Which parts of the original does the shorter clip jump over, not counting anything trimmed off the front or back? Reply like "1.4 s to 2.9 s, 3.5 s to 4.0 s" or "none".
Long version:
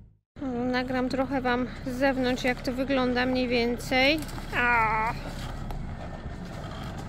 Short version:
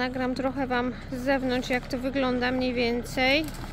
none